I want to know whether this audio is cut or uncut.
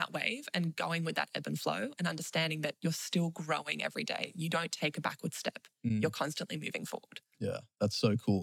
uncut